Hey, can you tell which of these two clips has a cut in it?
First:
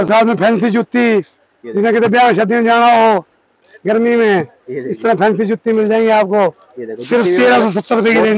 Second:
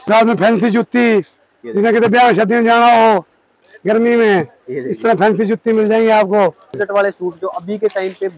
second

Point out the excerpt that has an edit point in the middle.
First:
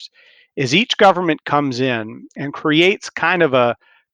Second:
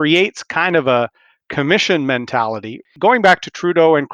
second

